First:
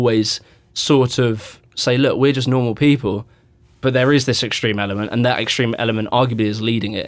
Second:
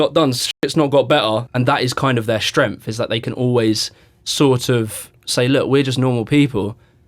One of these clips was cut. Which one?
second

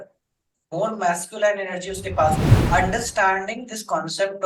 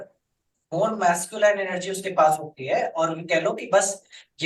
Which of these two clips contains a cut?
first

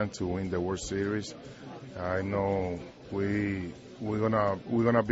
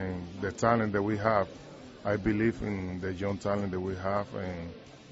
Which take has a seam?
first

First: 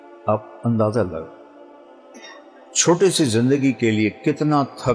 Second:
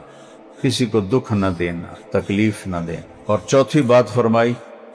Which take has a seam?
second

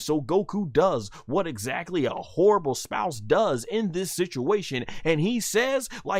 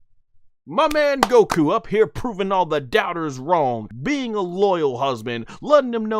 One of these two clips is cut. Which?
second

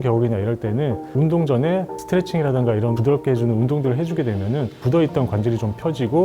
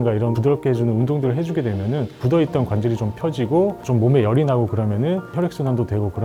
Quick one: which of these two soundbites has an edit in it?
first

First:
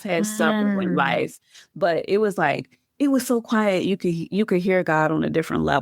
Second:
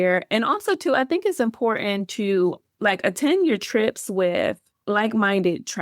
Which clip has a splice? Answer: second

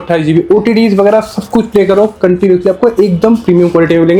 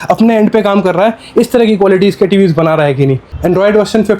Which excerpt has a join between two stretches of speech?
second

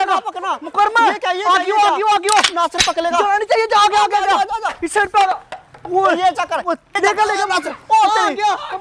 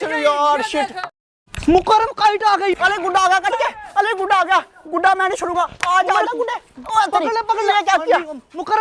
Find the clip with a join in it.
second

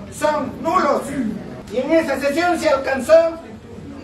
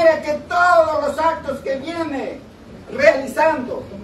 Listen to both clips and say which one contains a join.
first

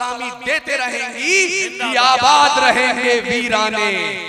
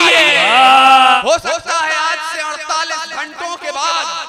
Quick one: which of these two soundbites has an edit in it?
second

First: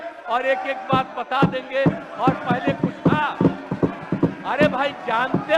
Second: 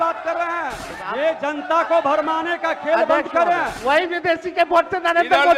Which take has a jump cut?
second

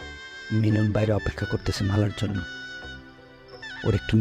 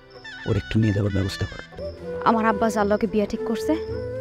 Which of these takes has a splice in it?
second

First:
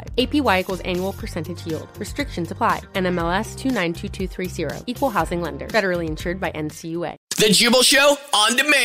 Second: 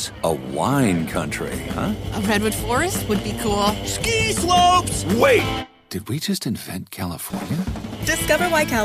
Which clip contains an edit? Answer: first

